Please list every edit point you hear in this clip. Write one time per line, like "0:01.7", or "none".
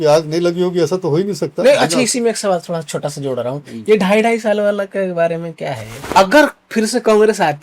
0:05.9